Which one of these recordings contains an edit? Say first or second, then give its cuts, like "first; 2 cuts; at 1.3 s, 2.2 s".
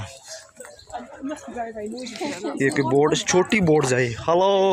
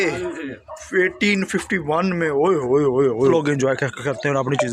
second; 1 cut; at 3.3 s